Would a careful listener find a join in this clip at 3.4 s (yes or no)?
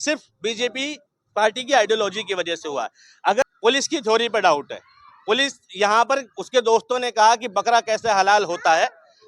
yes